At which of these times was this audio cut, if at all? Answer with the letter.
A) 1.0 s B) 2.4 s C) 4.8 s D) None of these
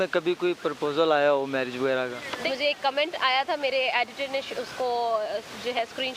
B